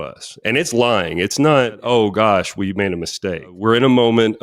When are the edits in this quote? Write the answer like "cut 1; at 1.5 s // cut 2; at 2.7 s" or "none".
cut 1; at 1.8 s // cut 2; at 3.5 s